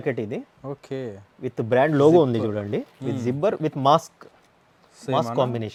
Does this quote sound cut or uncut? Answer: uncut